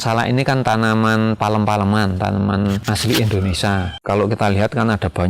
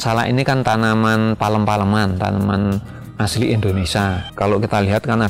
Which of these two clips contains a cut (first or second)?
first